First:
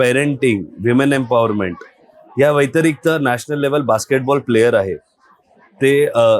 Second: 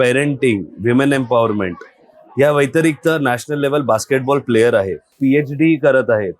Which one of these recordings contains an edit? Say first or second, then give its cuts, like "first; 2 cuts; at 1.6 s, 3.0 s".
second; 1 cut; at 5.1 s